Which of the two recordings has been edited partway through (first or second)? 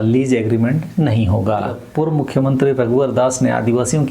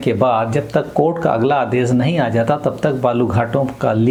first